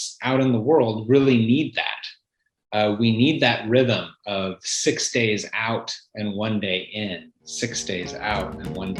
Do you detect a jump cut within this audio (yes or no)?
no